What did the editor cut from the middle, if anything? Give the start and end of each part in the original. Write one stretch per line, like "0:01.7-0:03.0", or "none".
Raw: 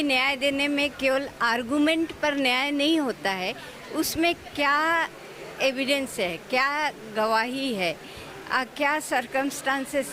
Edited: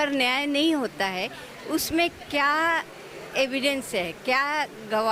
none